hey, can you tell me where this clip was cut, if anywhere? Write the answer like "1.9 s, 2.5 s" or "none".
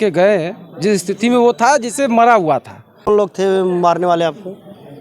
3.1 s